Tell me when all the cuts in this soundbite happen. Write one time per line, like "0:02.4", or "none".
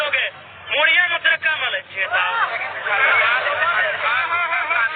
none